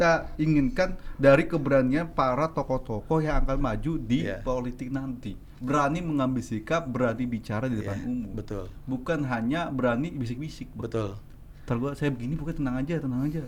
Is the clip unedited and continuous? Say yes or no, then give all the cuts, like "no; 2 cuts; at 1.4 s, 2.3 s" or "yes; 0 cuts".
yes; 0 cuts